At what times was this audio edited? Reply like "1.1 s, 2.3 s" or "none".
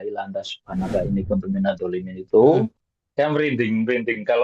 2.8 s